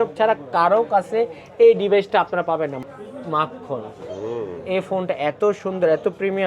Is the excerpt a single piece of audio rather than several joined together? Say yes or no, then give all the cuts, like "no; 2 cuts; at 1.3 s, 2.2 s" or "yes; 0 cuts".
no; 1 cut; at 2.8 s